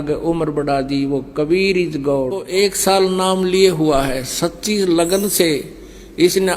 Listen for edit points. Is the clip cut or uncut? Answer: cut